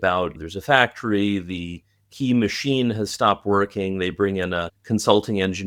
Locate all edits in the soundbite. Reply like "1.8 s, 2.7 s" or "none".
none